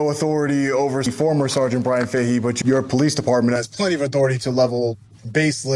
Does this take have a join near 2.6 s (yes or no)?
yes